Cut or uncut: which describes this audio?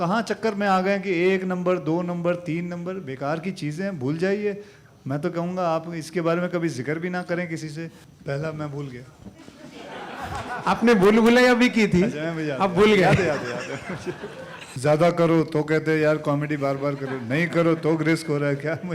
cut